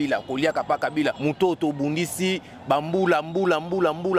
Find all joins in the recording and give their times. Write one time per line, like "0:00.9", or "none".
0:01.2